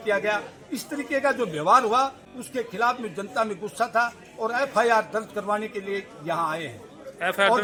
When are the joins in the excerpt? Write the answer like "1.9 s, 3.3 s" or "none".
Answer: none